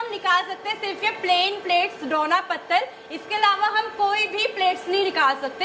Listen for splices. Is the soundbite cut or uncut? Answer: uncut